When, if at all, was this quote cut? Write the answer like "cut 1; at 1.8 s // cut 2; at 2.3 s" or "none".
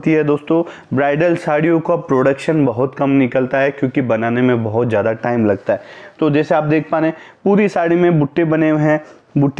none